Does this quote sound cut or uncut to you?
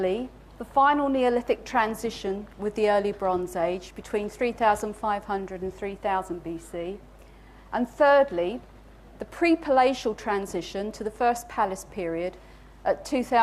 cut